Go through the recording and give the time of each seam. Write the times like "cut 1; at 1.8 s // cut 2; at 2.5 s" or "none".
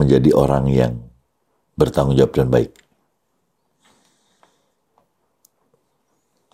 none